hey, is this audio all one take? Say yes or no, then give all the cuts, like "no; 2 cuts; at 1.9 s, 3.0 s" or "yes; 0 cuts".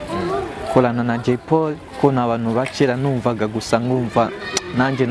yes; 0 cuts